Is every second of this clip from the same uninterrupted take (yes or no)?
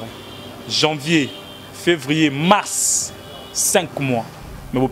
yes